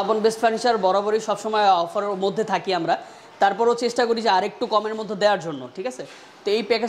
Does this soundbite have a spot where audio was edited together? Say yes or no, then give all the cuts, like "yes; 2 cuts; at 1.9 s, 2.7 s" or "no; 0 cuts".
no; 0 cuts